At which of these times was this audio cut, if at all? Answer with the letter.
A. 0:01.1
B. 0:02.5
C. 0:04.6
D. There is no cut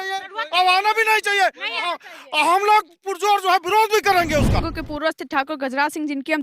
C